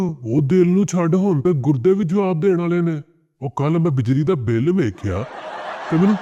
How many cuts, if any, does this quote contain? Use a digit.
0